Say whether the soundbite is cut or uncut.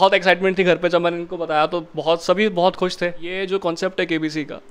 cut